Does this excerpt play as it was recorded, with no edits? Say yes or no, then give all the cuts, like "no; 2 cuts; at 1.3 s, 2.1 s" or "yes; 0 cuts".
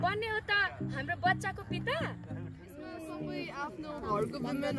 no; 1 cut; at 2.7 s